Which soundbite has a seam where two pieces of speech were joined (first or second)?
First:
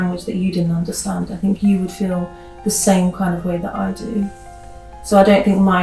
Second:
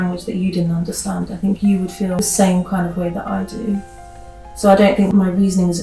second